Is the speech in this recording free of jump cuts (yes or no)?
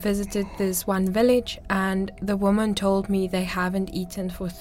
yes